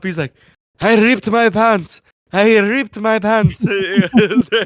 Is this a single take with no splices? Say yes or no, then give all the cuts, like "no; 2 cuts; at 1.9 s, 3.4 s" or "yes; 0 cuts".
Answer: yes; 0 cuts